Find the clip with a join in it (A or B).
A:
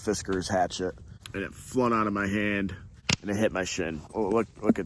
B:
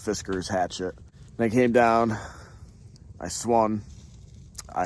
A